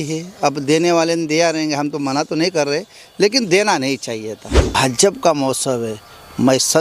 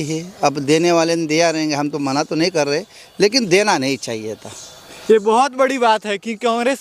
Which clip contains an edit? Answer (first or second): first